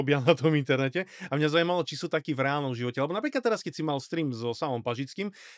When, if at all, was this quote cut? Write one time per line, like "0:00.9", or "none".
none